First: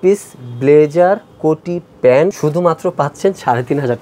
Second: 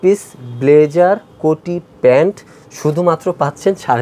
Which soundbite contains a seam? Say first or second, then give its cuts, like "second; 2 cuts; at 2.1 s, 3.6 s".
first; 1 cut; at 2.4 s